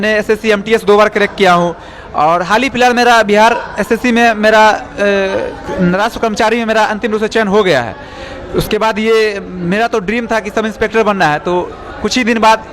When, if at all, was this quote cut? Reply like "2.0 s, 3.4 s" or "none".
none